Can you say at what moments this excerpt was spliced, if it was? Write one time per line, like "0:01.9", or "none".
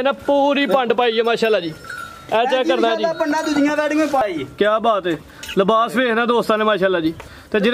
0:04.2